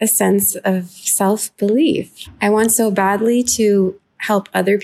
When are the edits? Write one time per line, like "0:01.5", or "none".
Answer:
none